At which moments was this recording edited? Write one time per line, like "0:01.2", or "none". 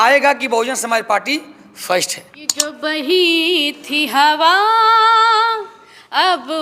0:02.6